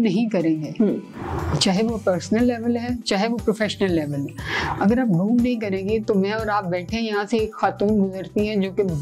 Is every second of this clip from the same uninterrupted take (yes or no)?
yes